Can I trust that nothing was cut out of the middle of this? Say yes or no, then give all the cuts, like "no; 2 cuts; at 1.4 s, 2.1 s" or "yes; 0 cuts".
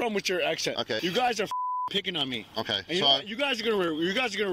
no; 1 cut; at 1.0 s